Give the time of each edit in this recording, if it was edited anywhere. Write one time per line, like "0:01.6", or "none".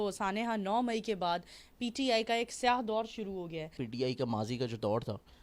0:03.8